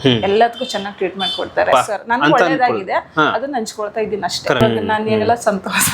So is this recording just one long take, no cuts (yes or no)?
no